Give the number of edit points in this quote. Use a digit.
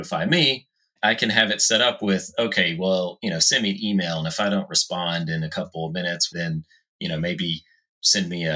1